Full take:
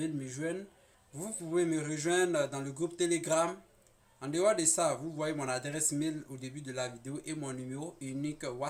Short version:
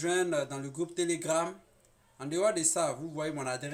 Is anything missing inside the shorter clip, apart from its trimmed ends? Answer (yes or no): no